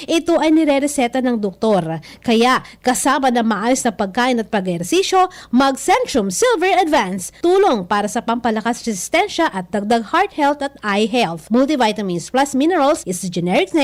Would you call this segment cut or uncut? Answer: uncut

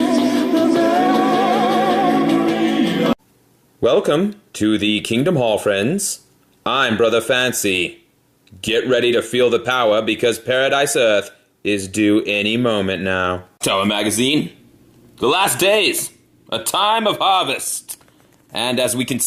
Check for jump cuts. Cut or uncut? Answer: cut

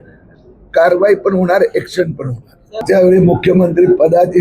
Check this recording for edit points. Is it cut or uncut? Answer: cut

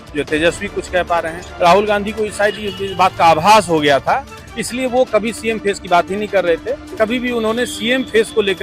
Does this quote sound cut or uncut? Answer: cut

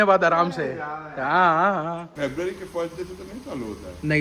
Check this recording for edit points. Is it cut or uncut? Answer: cut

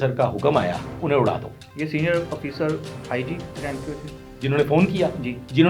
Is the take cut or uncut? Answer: cut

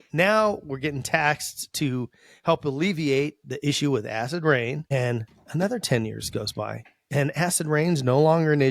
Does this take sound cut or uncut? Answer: uncut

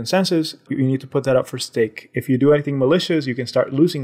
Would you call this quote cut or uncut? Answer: uncut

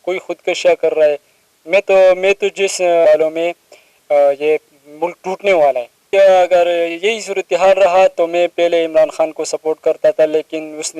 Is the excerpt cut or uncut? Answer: cut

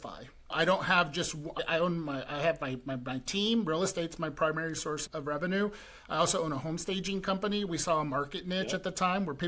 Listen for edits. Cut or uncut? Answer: uncut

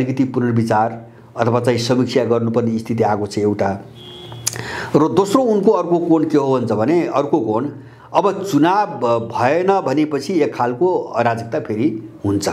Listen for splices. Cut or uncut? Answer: uncut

